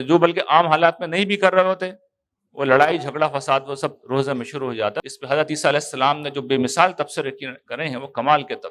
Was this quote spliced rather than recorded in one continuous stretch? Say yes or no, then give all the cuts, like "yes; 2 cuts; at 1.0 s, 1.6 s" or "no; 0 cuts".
yes; 1 cut; at 5.0 s